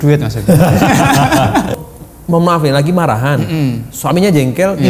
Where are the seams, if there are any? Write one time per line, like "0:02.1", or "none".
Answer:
0:01.8